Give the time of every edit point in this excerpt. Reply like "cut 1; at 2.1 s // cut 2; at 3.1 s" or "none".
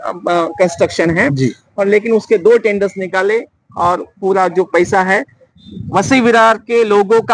none